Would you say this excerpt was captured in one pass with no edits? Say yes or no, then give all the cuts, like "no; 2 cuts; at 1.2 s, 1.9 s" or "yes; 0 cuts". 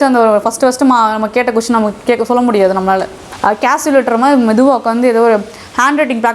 no; 1 cut; at 3.2 s